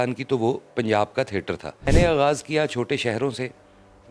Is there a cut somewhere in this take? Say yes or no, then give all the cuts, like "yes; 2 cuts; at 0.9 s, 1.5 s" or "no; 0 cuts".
yes; 1 cut; at 1.9 s